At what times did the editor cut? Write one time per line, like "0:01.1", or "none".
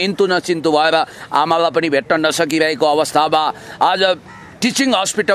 none